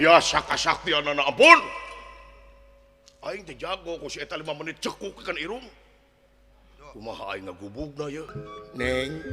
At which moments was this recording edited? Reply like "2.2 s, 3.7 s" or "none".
8.4 s